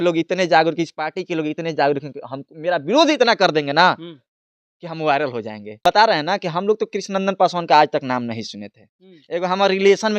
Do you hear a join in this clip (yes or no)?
yes